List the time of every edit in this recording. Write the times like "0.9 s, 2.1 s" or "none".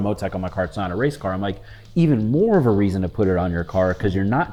none